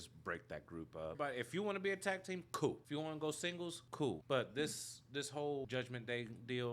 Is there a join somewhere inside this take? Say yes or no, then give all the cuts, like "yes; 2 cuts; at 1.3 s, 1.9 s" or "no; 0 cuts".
yes; 4 cuts; at 1.2 s, 2.8 s, 4.0 s, 5.6 s